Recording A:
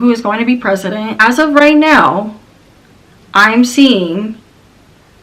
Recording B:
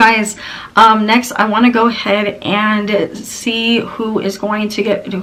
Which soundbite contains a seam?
A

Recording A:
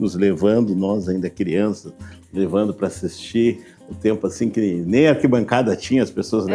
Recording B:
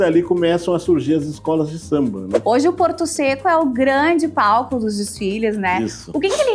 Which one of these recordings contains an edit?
B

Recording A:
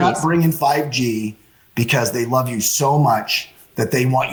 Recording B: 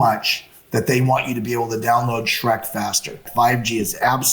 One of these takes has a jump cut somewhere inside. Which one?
B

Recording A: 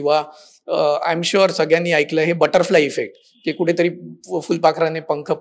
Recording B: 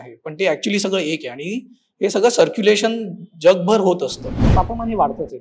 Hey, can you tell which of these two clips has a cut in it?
B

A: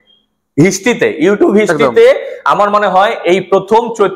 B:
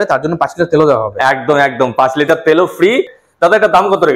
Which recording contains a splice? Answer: B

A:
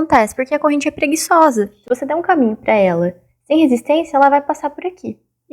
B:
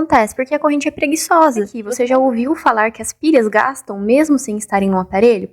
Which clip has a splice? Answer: B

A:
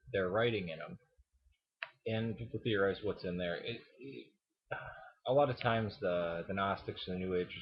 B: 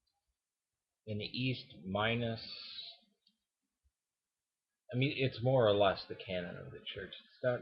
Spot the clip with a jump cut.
A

